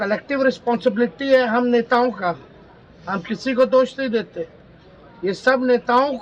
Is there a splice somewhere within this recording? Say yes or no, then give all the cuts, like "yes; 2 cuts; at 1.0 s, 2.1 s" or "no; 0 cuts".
no; 0 cuts